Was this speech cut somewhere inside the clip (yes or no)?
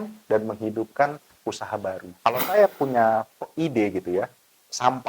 yes